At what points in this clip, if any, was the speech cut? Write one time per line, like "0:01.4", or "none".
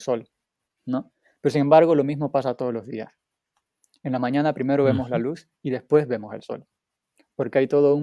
none